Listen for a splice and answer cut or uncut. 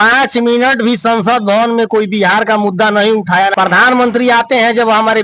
cut